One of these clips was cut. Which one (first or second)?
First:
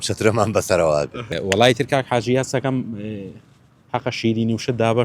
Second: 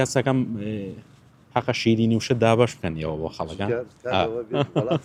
first